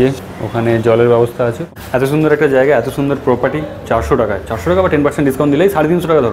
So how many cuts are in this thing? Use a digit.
1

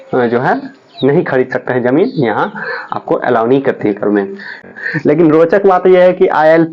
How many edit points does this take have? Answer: 1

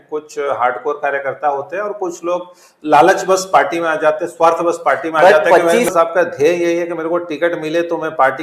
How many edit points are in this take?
1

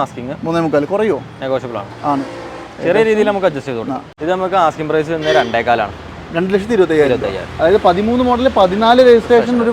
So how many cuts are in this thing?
1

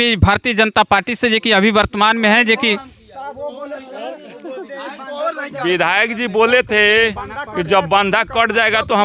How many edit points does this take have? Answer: 0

